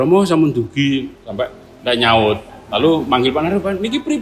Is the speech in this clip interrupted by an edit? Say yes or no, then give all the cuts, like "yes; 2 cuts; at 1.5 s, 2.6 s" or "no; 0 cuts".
no; 0 cuts